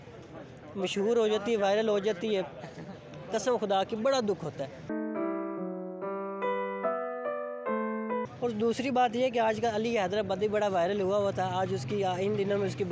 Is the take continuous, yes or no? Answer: no